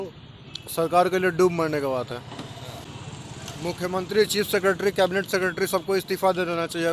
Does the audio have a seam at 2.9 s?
yes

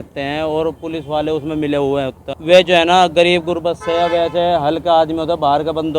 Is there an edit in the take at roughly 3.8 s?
no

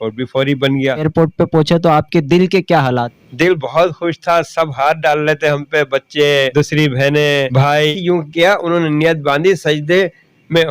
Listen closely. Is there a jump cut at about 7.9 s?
yes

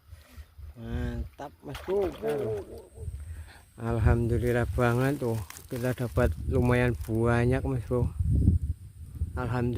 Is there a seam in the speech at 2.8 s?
yes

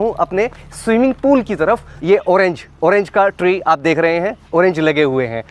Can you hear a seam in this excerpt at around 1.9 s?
yes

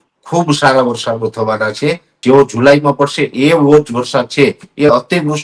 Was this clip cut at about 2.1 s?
yes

